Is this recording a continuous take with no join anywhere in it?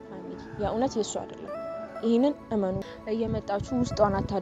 no; 1 cut; at 2.9 s

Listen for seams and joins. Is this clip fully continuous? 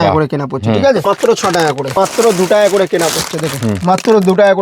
no; 2 cuts; at 1.0 s, 1.9 s

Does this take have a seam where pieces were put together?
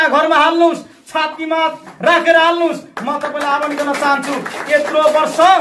no; 0 cuts

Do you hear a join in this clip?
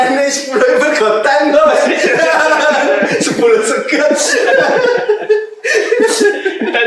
no; 0 cuts

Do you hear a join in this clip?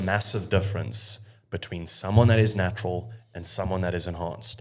no; 0 cuts

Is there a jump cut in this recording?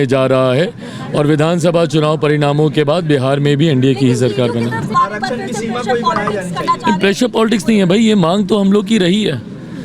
yes; 1 cut; at 4.9 s

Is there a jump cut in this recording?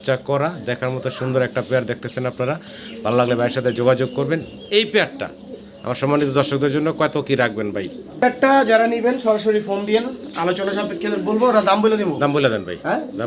no; 0 cuts

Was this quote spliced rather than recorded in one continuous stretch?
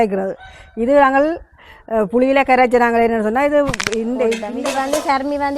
yes; 1 cut; at 4.5 s

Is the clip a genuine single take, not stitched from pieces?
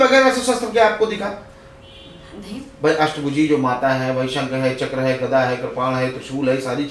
yes; 0 cuts

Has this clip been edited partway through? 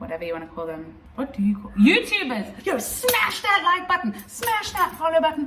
yes; 2 cuts; at 1.0 s, 2.5 s

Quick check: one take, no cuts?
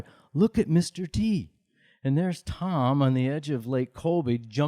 no; 1 cut; at 1.8 s

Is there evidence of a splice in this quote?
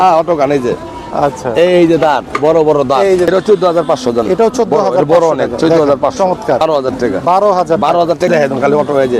yes; 3 cuts; at 3.3 s, 6.6 s, 8.3 s

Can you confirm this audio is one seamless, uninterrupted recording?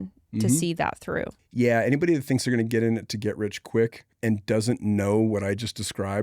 no; 2 cuts; at 1.4 s, 4.1 s

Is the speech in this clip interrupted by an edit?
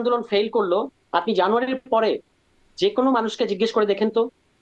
no; 0 cuts

